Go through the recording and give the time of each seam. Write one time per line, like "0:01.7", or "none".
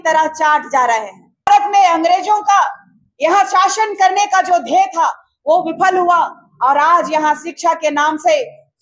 0:01.5